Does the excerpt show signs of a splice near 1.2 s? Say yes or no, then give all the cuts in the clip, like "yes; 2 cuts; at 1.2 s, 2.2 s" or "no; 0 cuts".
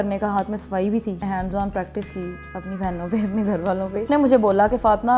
yes; 2 cuts; at 1.2 s, 4.0 s